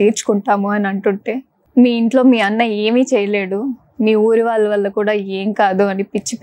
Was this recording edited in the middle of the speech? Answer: no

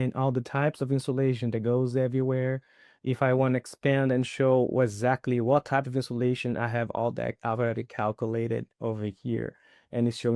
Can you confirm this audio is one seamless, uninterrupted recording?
yes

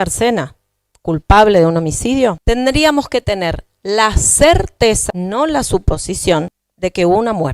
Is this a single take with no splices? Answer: no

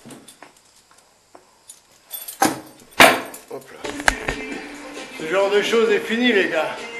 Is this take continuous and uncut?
no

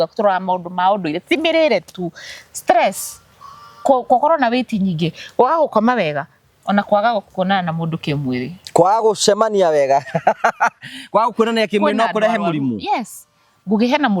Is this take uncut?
yes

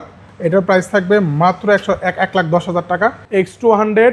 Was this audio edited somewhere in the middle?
yes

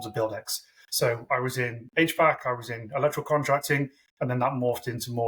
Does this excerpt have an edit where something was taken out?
no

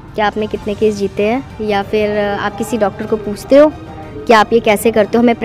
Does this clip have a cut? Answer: no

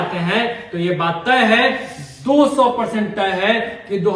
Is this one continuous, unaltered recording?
yes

